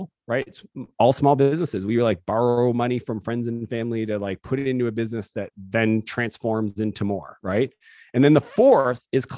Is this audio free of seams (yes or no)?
yes